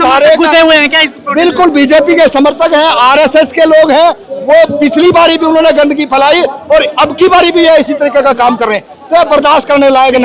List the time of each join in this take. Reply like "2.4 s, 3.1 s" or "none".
none